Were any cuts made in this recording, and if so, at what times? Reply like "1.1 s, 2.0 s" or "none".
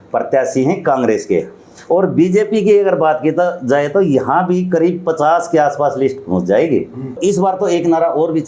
7.2 s